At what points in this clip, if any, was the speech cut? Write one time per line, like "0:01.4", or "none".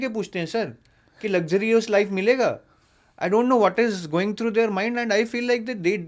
none